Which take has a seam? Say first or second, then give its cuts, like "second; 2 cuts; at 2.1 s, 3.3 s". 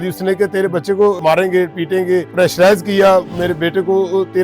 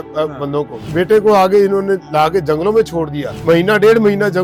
first; 2 cuts; at 1.2 s, 2.3 s